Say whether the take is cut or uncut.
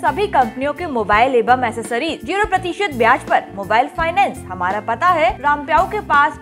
cut